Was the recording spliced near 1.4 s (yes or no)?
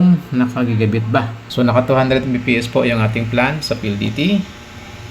yes